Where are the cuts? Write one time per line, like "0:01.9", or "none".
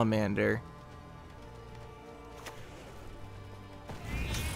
0:01.4